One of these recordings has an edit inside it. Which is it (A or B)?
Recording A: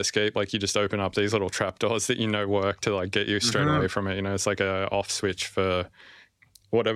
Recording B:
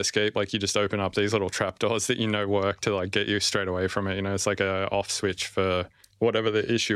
B